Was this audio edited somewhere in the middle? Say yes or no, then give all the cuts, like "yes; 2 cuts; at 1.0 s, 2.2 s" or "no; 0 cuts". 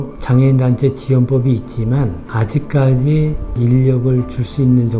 yes; 1 cut; at 3.6 s